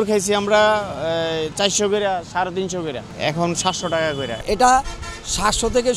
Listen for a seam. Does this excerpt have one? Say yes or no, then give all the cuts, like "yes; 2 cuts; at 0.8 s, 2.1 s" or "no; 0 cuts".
yes; 2 cuts; at 3.1 s, 4.3 s